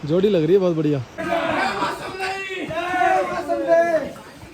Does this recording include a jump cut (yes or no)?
yes